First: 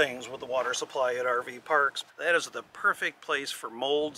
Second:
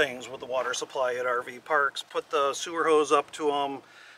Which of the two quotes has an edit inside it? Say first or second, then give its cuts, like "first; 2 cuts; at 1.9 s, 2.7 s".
first; 1 cut; at 2.0 s